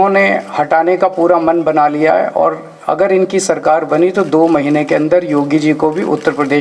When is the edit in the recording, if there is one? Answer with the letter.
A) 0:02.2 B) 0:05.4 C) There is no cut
C